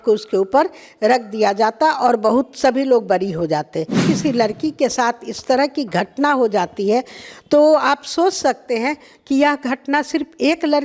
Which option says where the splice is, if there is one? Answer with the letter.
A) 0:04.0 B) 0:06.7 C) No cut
A